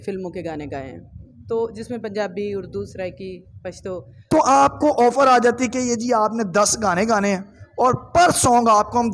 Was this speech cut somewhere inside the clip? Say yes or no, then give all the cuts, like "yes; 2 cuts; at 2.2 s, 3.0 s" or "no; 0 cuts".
yes; 1 cut; at 4.2 s